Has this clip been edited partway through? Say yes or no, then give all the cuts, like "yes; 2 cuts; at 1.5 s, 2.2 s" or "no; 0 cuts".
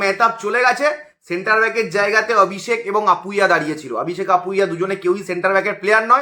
no; 0 cuts